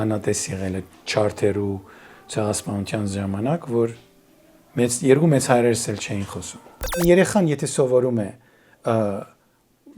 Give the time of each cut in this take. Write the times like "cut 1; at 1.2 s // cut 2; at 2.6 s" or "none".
cut 1; at 7.0 s